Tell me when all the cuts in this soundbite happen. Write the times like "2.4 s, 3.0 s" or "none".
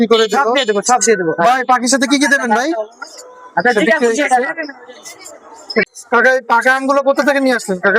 5.8 s